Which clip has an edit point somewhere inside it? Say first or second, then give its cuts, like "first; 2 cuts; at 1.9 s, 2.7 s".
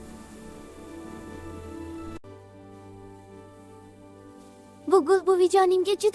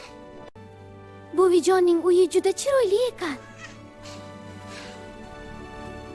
first; 1 cut; at 2.3 s